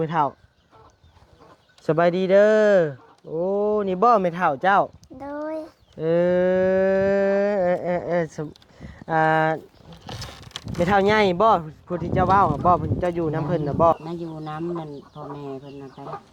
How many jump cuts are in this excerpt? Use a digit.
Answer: 1